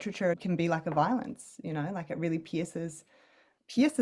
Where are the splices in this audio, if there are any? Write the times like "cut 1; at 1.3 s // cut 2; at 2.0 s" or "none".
none